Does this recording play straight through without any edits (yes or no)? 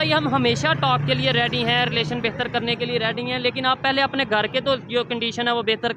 yes